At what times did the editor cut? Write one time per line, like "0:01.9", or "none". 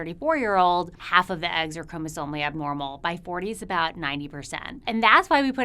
0:01.0
0:04.8